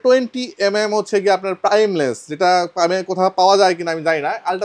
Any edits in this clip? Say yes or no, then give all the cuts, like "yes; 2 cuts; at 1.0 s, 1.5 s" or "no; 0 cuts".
no; 0 cuts